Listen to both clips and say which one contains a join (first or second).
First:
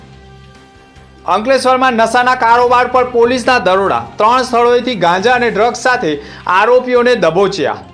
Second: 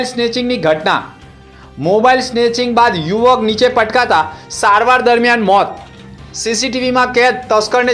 first